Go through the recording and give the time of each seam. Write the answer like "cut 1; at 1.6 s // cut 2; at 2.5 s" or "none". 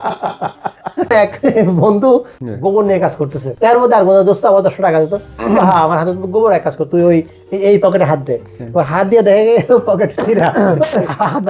cut 1; at 1.1 s // cut 2; at 2.4 s // cut 3; at 3.5 s